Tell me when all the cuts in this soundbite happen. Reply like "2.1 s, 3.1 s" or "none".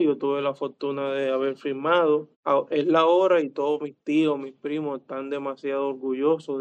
2.3 s